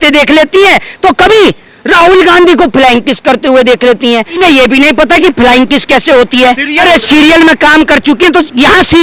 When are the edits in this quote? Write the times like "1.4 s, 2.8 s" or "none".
4.4 s, 6.8 s